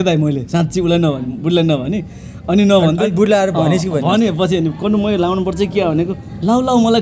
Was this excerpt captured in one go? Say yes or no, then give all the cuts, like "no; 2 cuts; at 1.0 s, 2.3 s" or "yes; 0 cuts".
yes; 0 cuts